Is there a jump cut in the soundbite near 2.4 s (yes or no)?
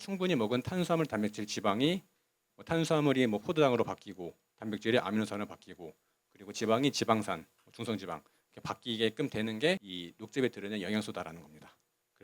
yes